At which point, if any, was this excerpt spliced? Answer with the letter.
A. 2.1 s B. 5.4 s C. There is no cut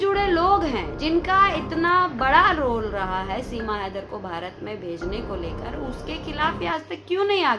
C